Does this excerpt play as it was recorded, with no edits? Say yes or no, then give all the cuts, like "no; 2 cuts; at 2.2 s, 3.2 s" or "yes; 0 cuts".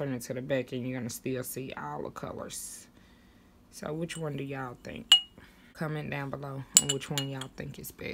no; 1 cut; at 5.7 s